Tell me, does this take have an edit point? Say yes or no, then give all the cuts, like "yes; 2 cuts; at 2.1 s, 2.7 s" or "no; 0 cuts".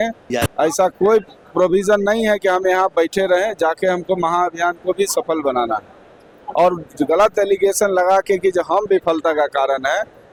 no; 0 cuts